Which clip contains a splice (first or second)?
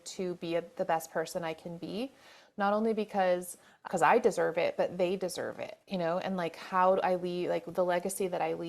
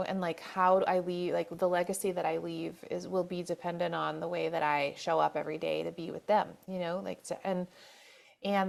first